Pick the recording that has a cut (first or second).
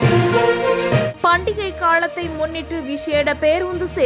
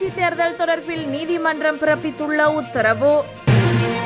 first